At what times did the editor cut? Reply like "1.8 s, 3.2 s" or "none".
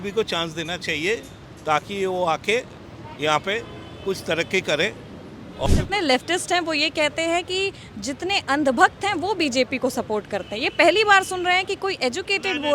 5.7 s